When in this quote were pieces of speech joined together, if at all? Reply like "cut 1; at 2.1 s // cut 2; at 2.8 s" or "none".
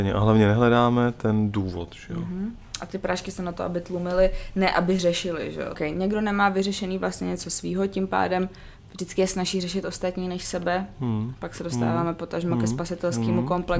cut 1; at 5.8 s